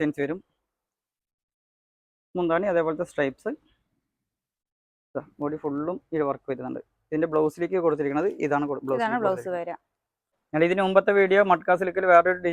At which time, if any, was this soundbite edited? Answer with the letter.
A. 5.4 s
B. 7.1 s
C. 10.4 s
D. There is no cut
C